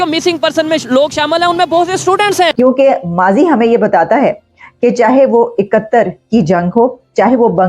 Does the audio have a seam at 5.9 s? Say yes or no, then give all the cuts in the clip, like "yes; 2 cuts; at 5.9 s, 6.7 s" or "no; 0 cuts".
no; 1 cut; at 2.5 s